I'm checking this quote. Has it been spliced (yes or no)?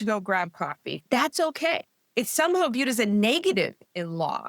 yes